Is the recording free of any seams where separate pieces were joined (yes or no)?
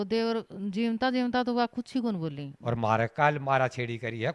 no